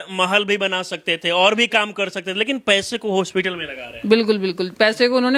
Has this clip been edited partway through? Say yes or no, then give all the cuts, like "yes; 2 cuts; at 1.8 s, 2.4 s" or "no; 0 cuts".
no; 0 cuts